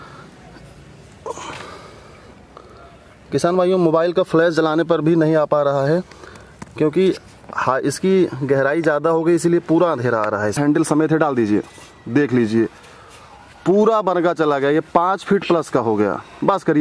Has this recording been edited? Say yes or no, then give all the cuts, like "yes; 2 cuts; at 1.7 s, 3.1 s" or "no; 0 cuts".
yes; 1 cut; at 10.6 s